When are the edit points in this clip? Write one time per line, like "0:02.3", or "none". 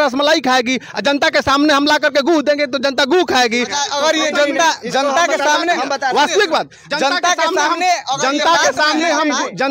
none

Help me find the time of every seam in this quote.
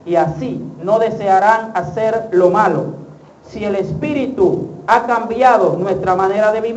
0:01.7

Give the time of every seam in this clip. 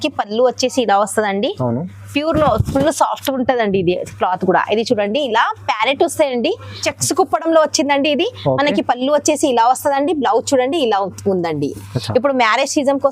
0:06.8

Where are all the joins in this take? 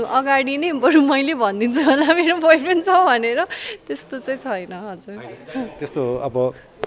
none

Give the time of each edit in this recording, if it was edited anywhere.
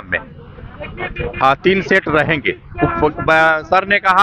none

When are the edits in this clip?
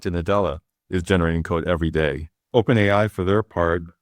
0:02.3

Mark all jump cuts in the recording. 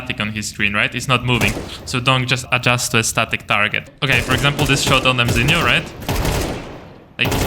0:02.4
0:03.9

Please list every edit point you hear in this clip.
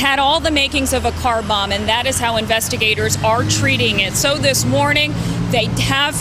none

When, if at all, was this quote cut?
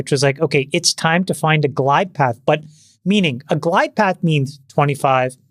none

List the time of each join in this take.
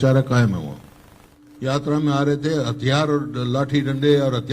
0:01.4

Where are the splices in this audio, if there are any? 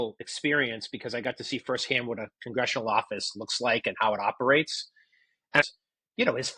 0:05.6

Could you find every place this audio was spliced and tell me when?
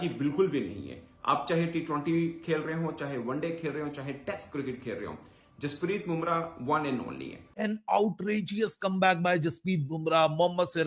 0:07.4

